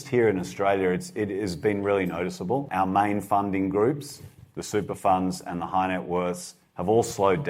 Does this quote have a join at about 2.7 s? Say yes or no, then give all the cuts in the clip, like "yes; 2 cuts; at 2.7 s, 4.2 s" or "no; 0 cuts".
yes; 1 cut; at 2.7 s